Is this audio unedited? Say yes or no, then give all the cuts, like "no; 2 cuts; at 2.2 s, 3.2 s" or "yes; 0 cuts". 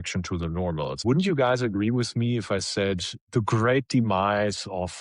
no; 1 cut; at 1.0 s